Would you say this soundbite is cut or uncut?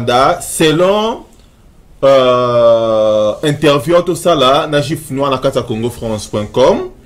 uncut